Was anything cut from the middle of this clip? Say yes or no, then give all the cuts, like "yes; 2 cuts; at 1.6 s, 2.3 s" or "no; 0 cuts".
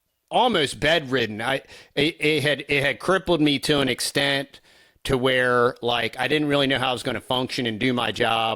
no; 0 cuts